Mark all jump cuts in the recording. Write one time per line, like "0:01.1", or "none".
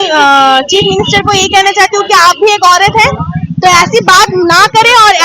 none